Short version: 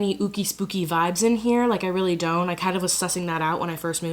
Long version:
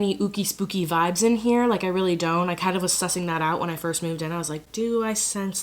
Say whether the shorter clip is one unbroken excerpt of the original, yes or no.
yes